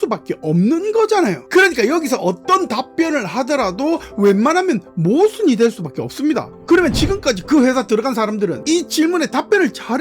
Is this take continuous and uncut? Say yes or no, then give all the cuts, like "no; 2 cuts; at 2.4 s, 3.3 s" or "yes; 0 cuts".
yes; 0 cuts